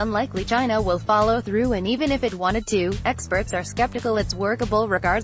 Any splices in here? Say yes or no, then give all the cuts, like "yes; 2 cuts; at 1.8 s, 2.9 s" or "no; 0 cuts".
no; 0 cuts